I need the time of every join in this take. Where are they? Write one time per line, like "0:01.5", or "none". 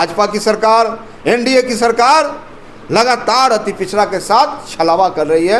none